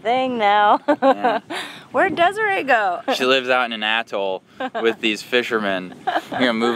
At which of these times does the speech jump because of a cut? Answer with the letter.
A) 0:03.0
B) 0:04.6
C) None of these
A